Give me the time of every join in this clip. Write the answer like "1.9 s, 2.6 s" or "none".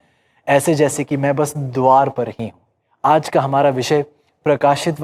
2.8 s